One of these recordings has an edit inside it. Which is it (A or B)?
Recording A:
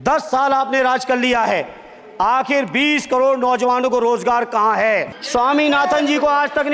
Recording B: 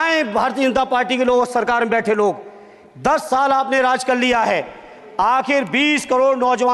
A